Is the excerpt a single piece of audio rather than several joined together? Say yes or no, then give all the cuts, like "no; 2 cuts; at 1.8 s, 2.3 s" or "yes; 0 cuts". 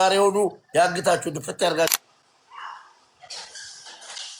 no; 1 cut; at 1.9 s